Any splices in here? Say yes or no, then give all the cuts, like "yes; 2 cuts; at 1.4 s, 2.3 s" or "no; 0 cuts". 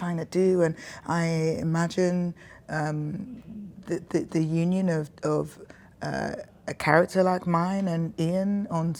no; 0 cuts